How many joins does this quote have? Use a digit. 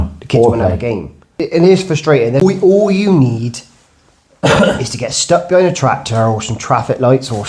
2